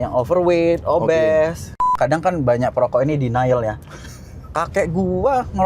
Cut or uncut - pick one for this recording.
cut